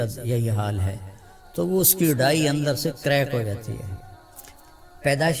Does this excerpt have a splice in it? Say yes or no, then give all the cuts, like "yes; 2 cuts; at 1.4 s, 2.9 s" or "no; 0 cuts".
no; 0 cuts